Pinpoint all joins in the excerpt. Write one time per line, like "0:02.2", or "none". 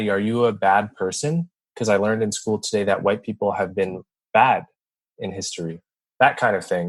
0:06.0

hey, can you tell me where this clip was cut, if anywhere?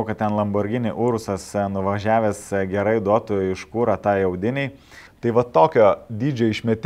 0:05.0

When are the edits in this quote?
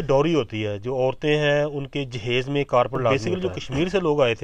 0:03.2

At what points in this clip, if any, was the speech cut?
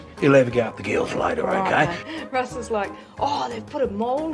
0:02.0

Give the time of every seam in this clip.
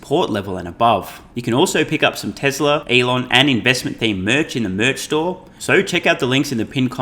0:01.2
0:02.8
0:05.5

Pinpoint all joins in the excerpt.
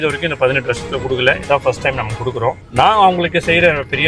0:02.6

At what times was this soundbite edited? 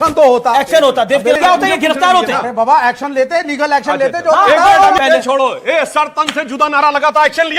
0:01.3
0:02.9
0:05.0

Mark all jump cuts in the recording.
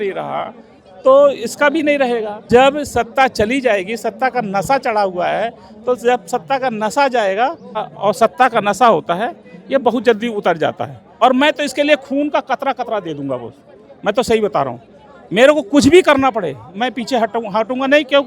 0:02.3
0:07.9
0:11.0

